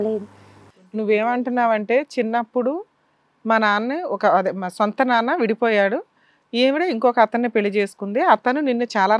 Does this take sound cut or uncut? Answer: uncut